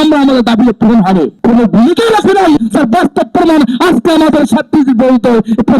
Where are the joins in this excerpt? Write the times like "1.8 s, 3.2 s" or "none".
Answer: 1.3 s